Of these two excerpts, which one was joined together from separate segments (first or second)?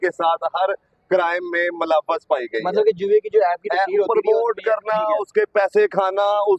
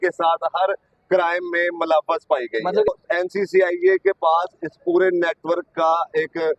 second